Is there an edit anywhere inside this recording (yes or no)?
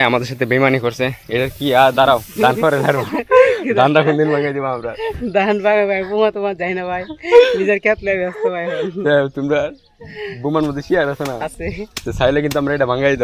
no